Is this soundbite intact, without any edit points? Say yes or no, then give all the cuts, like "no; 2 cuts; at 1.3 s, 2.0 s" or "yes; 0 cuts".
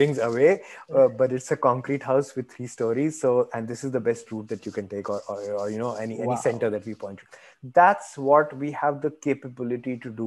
yes; 0 cuts